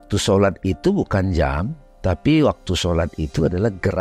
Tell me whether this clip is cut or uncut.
uncut